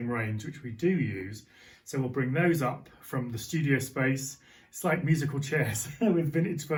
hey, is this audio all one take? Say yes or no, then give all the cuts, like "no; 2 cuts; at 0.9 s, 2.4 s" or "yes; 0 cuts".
yes; 0 cuts